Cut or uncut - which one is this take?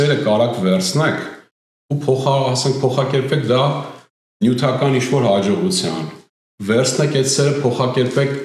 uncut